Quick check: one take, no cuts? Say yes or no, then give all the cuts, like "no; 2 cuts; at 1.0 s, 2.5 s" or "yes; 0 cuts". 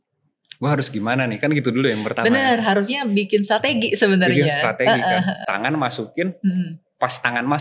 no; 1 cut; at 5.5 s